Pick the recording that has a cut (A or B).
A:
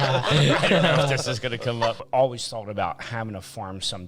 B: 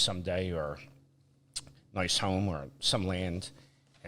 A